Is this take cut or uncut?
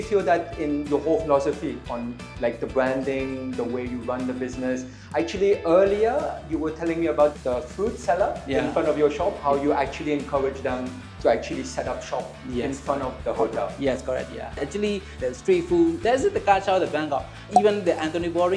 uncut